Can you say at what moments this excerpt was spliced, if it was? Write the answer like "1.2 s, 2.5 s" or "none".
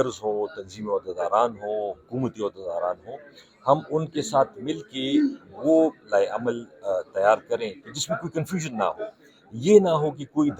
none